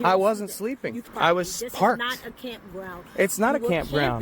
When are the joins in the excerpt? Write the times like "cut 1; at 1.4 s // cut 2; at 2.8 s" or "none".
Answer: cut 1; at 1.1 s